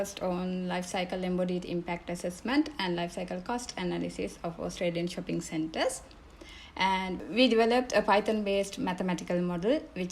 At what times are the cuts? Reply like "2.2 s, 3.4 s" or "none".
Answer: none